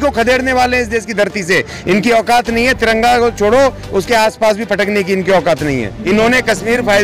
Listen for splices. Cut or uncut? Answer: cut